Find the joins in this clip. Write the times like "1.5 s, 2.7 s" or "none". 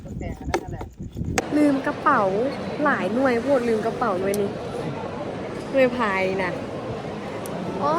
1.4 s